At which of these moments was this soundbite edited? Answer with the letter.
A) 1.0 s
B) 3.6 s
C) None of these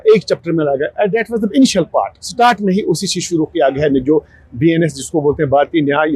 C